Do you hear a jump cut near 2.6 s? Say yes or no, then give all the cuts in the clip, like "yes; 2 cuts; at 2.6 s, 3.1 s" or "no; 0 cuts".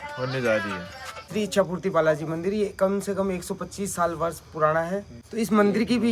no; 2 cuts; at 1.2 s, 5.2 s